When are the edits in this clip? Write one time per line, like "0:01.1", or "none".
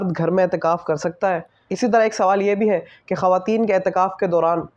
0:01.6